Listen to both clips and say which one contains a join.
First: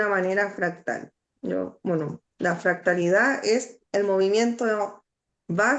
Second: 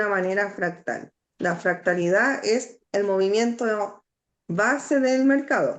second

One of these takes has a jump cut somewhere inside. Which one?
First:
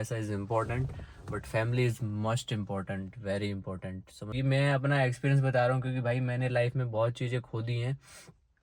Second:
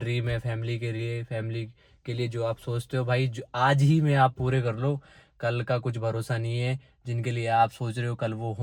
first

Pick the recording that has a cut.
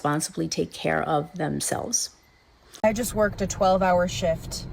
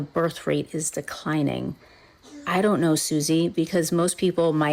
first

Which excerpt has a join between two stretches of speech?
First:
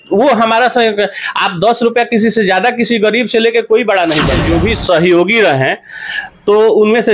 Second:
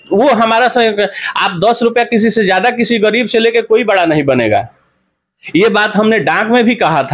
first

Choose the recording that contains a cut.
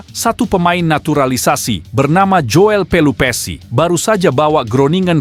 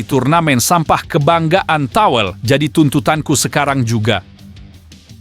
second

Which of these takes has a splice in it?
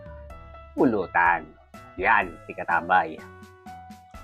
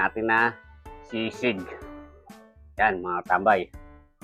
first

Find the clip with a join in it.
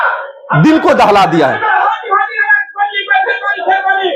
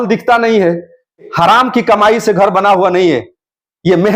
second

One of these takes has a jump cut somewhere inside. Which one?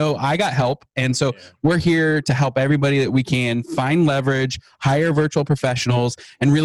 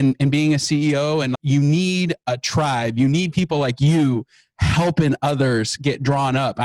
second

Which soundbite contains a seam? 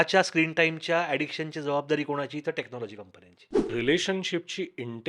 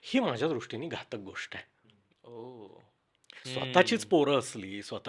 first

